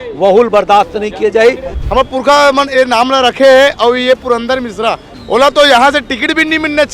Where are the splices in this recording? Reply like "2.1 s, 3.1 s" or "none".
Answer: 1.7 s, 5.1 s